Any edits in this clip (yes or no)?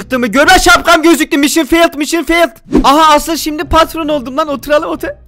yes